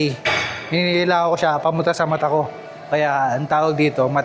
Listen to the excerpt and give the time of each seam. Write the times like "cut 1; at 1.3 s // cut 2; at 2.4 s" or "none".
none